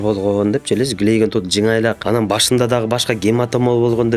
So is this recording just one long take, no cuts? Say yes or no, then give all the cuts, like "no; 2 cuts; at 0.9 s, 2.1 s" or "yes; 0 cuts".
no; 1 cut; at 2.0 s